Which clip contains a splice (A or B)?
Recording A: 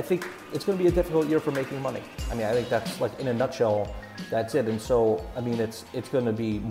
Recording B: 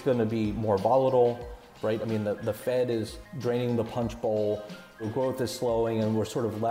B